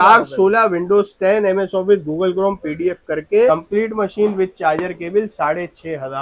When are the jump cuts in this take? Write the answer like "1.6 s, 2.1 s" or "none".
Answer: 3.5 s